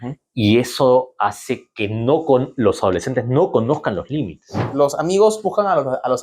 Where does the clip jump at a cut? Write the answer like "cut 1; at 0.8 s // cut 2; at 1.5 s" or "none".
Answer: cut 1; at 4.6 s